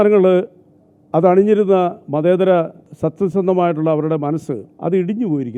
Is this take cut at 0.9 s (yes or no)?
no